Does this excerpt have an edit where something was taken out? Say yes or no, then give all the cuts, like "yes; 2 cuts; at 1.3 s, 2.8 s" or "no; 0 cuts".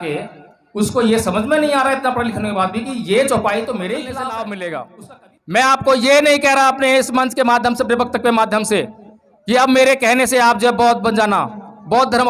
yes; 1 cut; at 4.1 s